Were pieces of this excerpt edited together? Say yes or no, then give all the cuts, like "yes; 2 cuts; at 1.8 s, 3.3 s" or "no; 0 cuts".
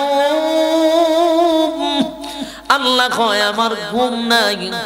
no; 0 cuts